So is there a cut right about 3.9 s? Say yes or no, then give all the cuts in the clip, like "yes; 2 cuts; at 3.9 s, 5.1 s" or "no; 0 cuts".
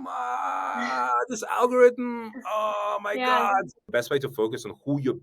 yes; 1 cut; at 3.9 s